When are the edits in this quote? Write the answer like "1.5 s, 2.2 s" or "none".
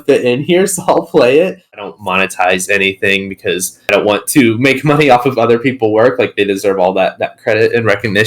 1.8 s